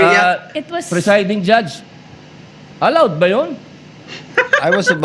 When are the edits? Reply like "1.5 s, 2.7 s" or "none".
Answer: none